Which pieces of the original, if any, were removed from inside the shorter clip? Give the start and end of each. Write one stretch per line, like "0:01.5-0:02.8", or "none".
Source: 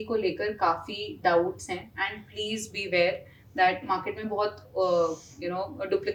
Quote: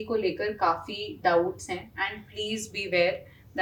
none

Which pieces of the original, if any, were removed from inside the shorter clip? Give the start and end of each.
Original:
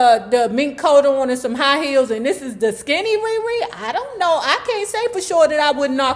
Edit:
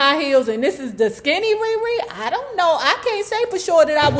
none

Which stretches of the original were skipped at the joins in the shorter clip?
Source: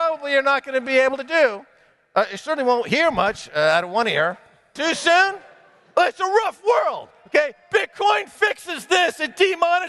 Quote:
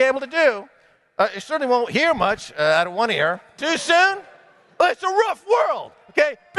0:04.5-0:04.7

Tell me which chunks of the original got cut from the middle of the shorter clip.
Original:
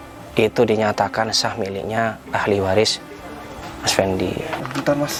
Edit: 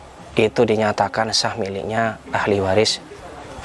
none

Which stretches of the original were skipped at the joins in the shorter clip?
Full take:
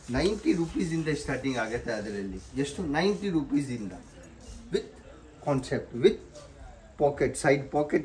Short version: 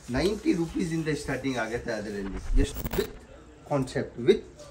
0:02.7-0:04.5

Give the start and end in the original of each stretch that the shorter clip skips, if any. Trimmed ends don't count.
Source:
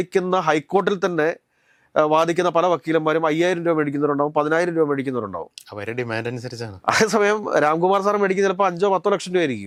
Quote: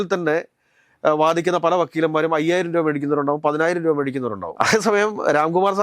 0:05.4-0:06.7

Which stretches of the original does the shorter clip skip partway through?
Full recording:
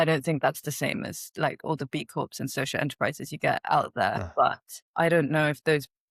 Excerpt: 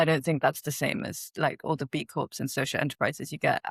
none

